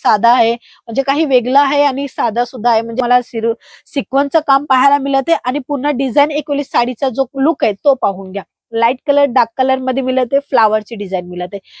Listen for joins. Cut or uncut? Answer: cut